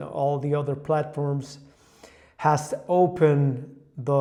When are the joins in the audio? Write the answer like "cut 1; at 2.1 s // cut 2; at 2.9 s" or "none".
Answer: none